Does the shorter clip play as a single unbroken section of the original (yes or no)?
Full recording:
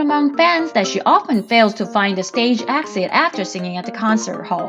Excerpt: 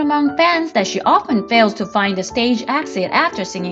yes